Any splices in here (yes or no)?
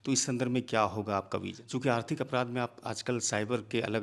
yes